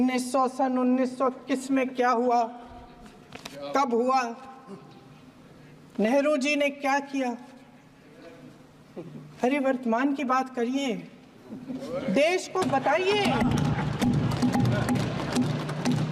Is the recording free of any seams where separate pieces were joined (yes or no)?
yes